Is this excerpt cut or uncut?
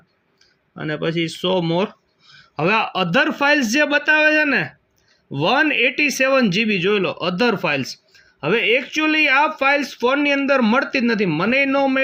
uncut